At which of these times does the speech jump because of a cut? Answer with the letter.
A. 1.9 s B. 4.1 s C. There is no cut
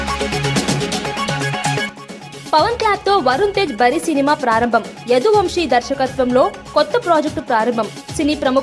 A